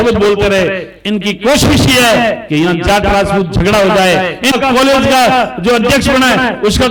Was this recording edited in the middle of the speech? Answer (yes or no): yes